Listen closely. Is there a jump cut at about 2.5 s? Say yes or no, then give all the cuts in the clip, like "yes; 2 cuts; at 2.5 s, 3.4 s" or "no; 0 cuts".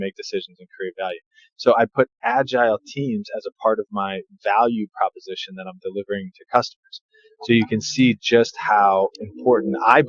no; 0 cuts